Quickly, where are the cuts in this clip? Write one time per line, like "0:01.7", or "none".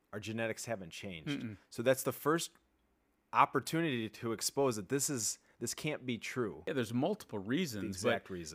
0:06.6